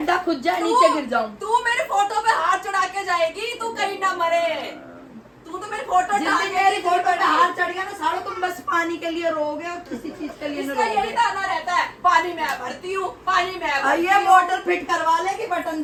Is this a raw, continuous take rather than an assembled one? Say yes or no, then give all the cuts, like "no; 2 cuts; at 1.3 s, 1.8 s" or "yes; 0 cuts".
yes; 0 cuts